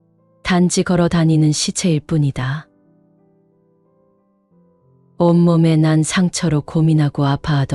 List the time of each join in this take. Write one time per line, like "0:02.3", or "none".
none